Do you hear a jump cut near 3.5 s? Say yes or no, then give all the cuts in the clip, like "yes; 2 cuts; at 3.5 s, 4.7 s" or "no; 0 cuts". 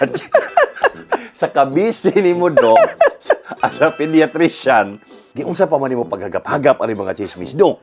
no; 0 cuts